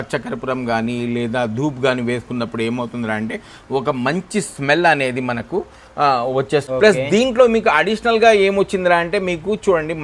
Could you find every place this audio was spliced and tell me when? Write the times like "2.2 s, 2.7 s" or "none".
6.7 s